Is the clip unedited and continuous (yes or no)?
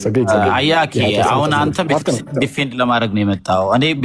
yes